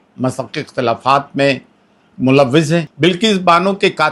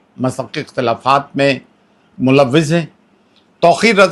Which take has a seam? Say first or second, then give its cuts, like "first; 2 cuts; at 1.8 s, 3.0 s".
first; 1 cut; at 2.9 s